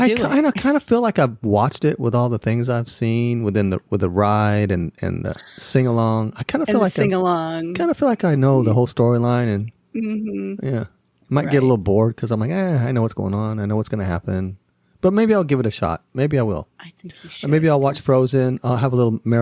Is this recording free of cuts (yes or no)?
yes